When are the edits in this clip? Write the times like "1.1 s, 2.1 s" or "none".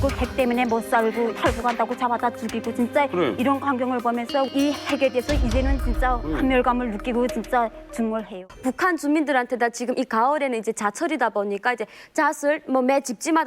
8.3 s